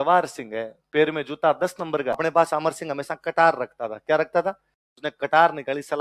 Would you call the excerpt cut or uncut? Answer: cut